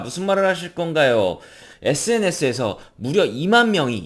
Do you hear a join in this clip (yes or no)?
yes